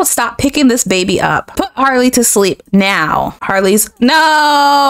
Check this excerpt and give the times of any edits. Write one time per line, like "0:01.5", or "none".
none